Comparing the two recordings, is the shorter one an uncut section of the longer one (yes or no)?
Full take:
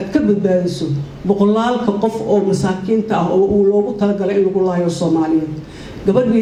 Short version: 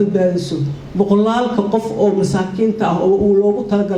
yes